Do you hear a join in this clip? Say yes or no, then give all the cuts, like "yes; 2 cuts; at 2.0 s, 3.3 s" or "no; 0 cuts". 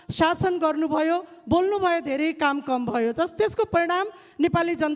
no; 0 cuts